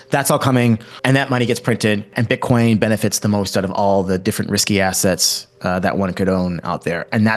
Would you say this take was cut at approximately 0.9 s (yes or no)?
yes